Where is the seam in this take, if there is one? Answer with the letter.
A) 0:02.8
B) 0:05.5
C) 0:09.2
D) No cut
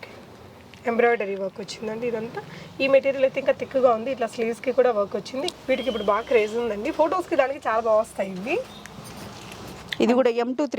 B